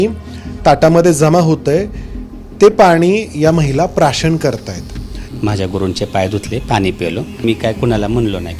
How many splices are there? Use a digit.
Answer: 2